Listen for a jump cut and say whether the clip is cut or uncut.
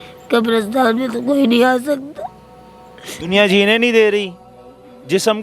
uncut